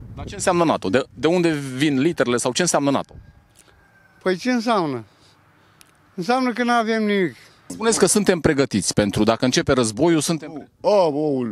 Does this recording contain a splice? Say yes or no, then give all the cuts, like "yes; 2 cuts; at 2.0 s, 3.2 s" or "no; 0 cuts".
yes; 1 cut; at 7.8 s